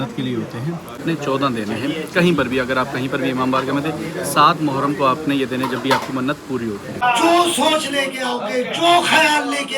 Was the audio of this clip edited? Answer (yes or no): yes